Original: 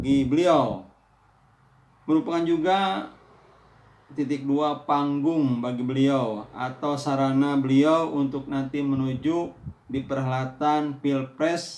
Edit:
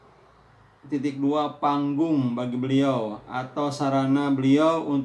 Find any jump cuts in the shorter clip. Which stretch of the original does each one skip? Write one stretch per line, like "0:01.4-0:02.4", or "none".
none

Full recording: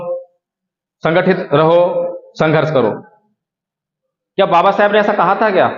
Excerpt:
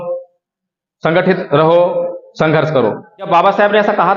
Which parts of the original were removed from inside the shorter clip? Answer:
0:03.3-0:04.5

